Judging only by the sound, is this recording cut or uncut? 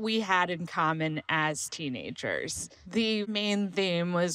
cut